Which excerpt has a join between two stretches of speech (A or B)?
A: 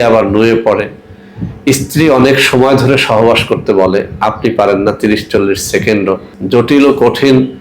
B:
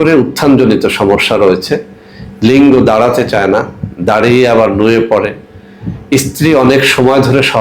A